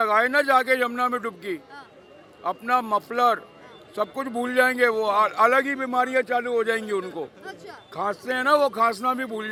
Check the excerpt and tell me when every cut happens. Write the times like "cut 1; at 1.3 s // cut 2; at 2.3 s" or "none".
none